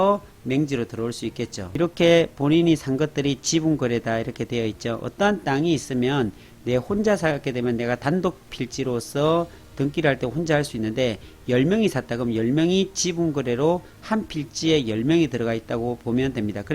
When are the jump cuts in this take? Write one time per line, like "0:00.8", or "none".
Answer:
0:01.6

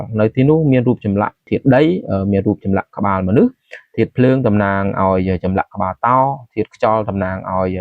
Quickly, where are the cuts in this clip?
0:01.5

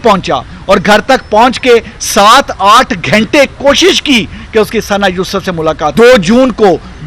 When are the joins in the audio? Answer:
0:05.9

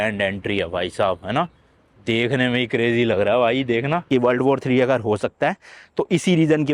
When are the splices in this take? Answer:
0:04.0

